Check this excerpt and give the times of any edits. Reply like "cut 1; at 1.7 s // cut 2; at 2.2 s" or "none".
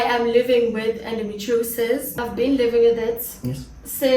cut 1; at 2.2 s